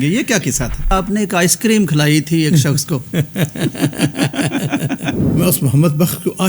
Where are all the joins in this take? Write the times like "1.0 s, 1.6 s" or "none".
0.9 s, 5.2 s